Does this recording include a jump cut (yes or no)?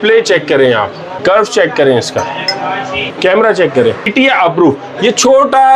yes